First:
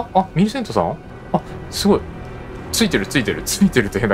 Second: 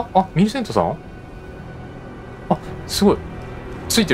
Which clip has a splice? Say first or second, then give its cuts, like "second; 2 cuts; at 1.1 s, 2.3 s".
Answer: first; 1 cut; at 1.1 s